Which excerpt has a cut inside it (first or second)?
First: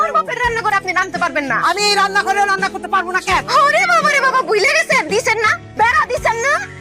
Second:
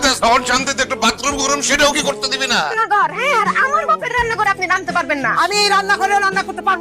second